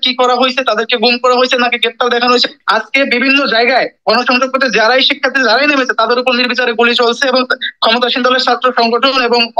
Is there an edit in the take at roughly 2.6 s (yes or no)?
yes